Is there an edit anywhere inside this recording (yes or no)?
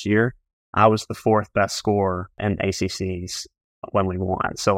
yes